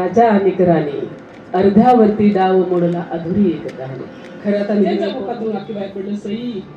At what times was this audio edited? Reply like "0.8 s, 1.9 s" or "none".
5.2 s